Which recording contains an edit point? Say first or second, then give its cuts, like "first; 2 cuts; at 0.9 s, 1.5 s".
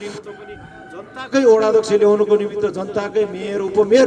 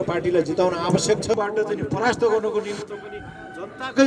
second; 1 cut; at 1.3 s